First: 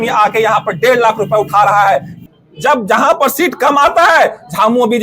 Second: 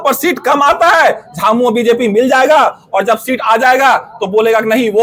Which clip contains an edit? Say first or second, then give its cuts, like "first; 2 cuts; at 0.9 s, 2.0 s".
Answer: first; 1 cut; at 2.1 s